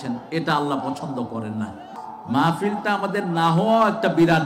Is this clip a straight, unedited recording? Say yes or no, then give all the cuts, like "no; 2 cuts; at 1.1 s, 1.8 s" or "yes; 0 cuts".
no; 1 cut; at 1.9 s